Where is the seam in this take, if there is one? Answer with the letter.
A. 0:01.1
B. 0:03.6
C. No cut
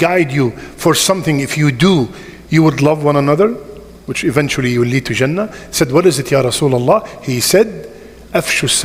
C